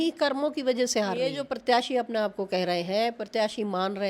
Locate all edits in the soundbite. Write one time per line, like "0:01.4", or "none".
0:01.5